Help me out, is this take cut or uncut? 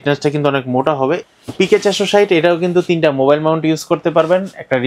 cut